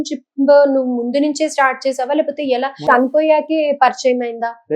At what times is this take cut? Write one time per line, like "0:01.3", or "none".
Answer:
0:02.8